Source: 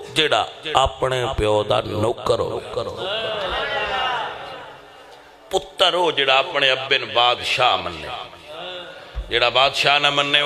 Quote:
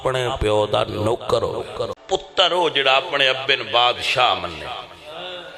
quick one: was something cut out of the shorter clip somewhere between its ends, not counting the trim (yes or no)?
yes